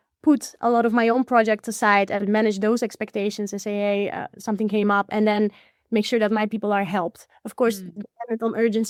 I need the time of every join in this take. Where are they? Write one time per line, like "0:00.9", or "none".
none